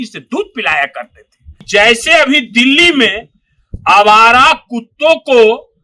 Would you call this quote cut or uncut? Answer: cut